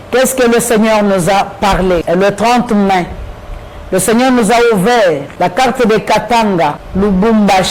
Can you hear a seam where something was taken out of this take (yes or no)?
yes